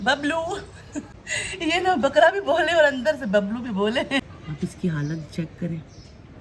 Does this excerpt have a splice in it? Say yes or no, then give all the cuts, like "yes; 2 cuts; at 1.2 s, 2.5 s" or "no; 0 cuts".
yes; 2 cuts; at 1.1 s, 4.4 s